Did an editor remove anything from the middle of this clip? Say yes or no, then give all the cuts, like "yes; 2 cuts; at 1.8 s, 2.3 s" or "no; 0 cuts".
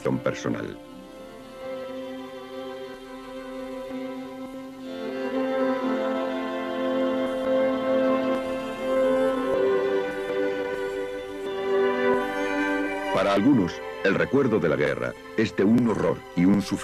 yes; 1 cut; at 10.5 s